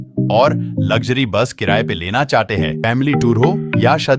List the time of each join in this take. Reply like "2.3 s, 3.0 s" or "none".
2.8 s